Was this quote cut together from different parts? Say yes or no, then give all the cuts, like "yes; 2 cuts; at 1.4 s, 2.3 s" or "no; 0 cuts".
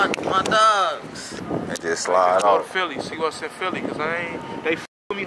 yes; 1 cut; at 1.2 s